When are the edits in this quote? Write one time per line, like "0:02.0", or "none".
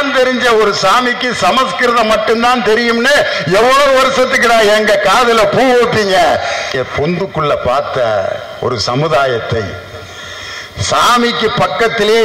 0:06.8